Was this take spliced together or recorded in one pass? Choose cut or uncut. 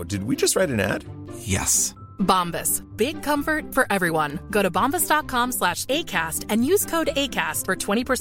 uncut